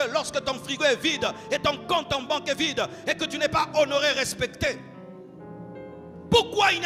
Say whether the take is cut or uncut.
uncut